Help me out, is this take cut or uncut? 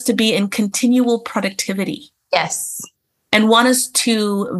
uncut